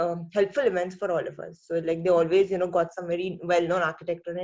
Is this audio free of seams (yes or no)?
yes